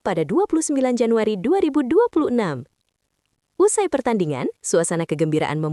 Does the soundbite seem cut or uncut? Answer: uncut